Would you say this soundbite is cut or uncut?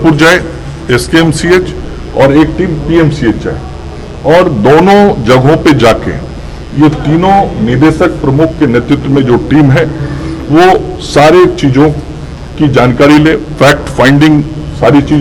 uncut